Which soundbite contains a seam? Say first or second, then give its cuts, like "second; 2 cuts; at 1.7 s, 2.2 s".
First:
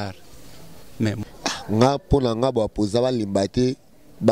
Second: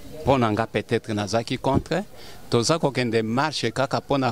first; 1 cut; at 1.2 s